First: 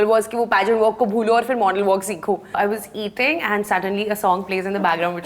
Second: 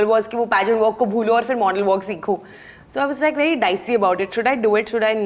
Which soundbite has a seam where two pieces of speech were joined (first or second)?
first